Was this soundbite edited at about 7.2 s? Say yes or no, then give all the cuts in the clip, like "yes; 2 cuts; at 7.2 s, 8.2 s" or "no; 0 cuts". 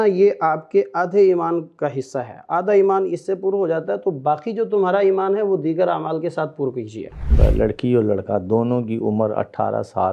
yes; 2 cuts; at 1.7 s, 7.2 s